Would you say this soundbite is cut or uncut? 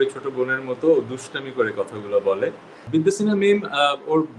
cut